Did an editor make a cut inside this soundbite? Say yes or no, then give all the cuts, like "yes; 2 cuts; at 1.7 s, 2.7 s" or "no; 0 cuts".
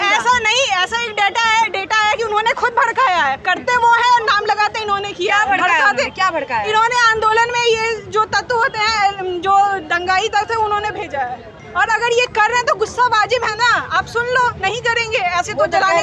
no; 0 cuts